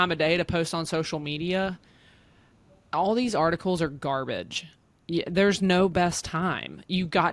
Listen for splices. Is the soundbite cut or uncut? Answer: uncut